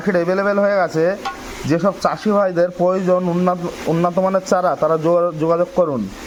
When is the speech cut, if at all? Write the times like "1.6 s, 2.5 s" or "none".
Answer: none